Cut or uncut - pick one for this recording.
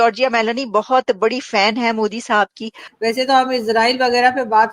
cut